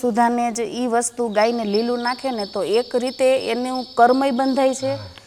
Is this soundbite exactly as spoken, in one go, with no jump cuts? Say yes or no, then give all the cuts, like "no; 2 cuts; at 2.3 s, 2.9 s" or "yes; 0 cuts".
yes; 0 cuts